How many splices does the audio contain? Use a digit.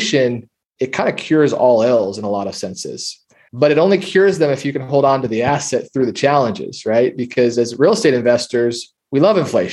0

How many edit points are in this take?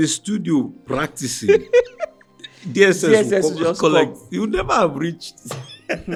0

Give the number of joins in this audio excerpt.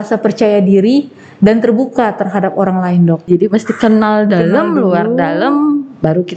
1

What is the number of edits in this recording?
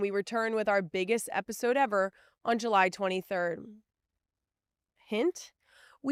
0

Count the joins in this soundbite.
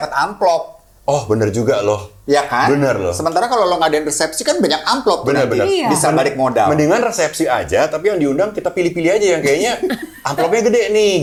0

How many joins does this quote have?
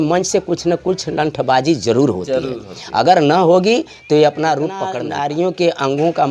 1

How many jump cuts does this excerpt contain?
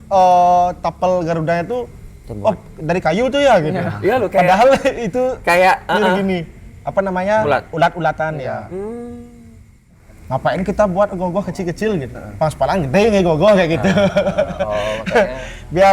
1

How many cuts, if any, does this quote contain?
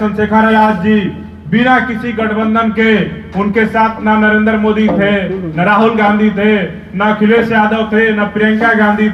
0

